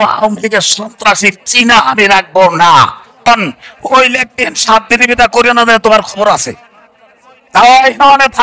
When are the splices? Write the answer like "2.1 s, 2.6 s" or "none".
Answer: 3.3 s